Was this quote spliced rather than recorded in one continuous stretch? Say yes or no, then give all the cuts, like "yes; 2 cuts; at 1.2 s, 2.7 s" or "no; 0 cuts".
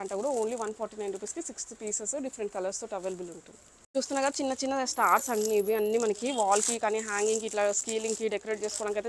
no; 0 cuts